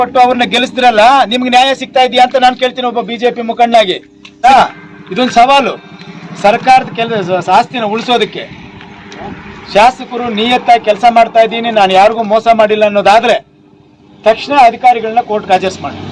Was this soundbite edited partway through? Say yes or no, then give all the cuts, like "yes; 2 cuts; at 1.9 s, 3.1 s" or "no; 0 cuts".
yes; 1 cut; at 4.4 s